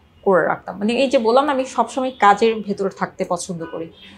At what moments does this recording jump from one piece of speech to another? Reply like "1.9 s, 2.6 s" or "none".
none